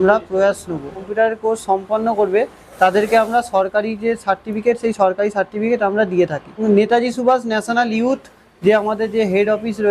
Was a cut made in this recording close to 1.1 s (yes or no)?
yes